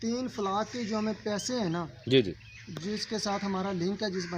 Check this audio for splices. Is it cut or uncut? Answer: uncut